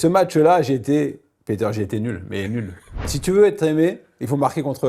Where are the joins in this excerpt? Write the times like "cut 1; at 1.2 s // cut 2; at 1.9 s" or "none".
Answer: cut 1; at 3.0 s